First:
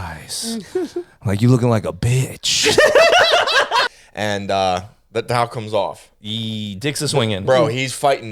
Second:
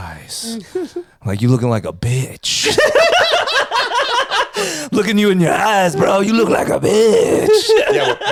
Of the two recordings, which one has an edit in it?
first; 1 cut; at 3.9 s

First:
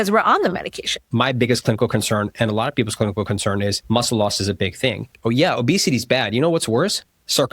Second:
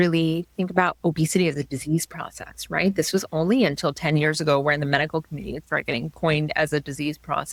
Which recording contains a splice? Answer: first; 3 cuts; at 1.0 s, 3.8 s, 5.1 s

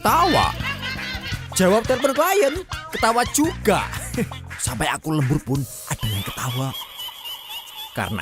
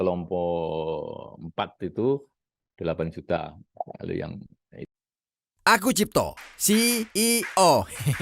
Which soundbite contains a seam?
second; 1 cut; at 4.9 s

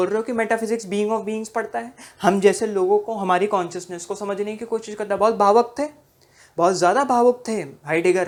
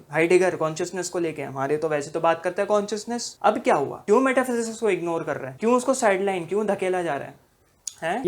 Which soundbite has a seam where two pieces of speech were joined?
second; 3 cuts; at 3.2 s, 4.0 s, 5.4 s

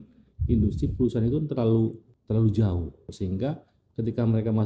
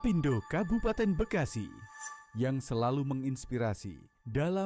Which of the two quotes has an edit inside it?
first; 2 cuts; at 2.1 s, 3.1 s

